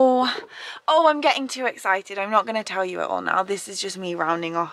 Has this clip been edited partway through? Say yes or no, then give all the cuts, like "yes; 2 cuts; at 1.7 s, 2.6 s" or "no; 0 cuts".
no; 0 cuts